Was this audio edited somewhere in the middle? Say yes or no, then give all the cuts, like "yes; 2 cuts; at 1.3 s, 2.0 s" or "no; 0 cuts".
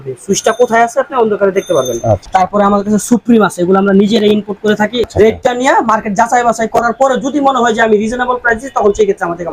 yes; 2 cuts; at 2.3 s, 5.0 s